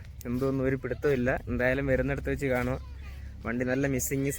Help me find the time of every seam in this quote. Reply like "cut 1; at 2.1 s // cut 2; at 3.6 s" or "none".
none